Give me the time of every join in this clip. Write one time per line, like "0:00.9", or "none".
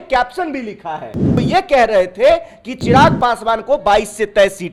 0:01.3